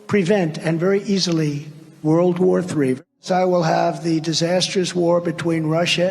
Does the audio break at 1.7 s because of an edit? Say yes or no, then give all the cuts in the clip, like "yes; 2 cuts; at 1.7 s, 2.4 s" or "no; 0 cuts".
no; 1 cut; at 3.0 s